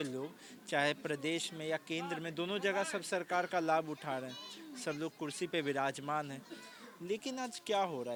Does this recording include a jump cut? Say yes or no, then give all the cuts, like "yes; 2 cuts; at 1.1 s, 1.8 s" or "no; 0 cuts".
no; 0 cuts